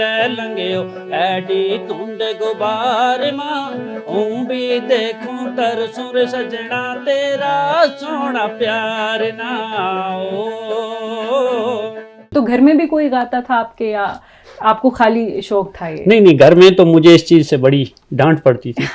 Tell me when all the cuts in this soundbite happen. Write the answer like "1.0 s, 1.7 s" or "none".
12.3 s